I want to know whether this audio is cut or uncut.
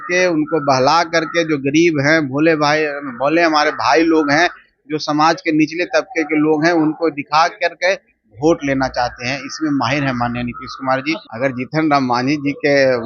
cut